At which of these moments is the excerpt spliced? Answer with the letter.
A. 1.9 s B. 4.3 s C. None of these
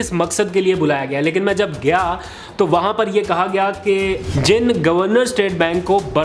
B